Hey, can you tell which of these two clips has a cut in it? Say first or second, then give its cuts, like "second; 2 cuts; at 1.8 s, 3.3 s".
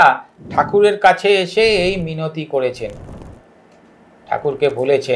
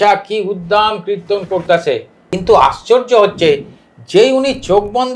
second; 1 cut; at 2.2 s